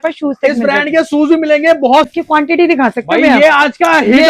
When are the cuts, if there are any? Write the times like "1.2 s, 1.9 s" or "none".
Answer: 2.1 s